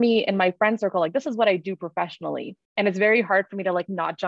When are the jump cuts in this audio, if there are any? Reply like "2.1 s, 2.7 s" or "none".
2.6 s